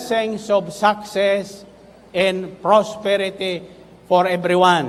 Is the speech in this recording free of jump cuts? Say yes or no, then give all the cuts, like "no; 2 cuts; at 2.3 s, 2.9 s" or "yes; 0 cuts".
yes; 0 cuts